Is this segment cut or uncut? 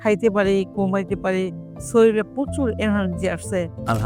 uncut